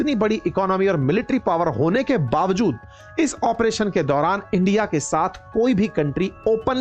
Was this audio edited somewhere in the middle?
no; 0 cuts

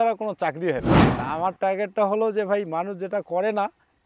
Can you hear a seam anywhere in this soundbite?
yes; 1 cut; at 1.0 s

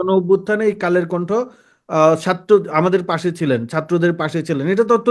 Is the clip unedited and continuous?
yes; 0 cuts

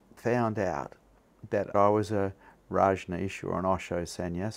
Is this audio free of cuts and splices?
no; 1 cut; at 1.7 s

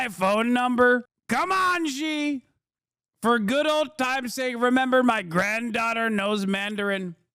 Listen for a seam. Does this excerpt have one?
yes; 1 cut; at 1.1 s

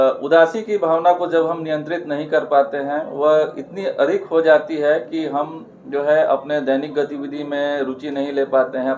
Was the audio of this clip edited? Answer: no; 0 cuts

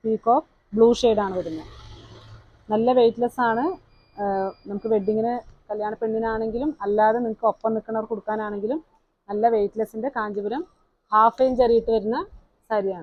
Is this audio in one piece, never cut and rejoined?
yes; 0 cuts

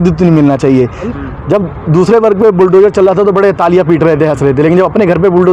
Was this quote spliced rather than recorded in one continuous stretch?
yes; 1 cut; at 1.2 s

